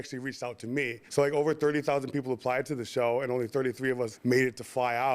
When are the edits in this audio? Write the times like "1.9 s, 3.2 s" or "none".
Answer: 1.0 s, 4.1 s